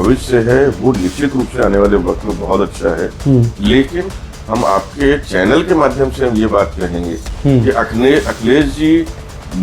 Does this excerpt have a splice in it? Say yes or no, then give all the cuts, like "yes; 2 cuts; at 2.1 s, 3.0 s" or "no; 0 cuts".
no; 0 cuts